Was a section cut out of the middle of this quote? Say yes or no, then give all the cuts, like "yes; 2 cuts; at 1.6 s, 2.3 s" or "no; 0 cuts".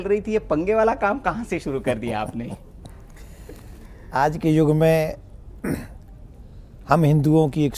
no; 0 cuts